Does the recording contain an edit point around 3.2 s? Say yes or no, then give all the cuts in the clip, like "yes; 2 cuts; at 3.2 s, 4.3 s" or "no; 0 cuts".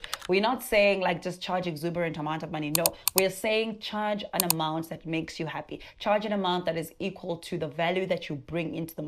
no; 0 cuts